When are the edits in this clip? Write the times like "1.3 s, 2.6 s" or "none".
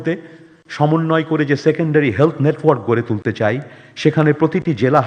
none